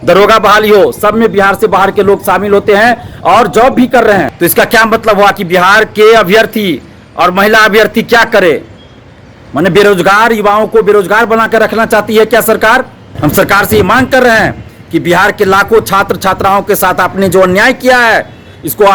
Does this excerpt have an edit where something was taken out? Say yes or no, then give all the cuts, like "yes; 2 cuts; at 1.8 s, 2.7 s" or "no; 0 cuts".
yes; 2 cuts; at 4.3 s, 13.0 s